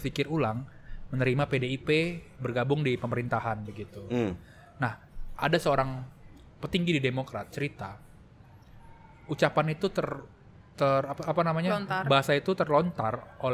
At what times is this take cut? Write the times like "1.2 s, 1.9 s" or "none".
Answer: none